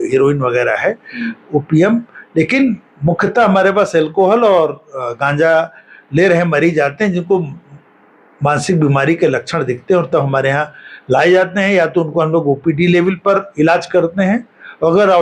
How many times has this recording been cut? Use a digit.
0